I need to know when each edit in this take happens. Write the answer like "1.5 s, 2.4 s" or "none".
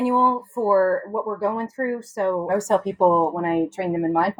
2.5 s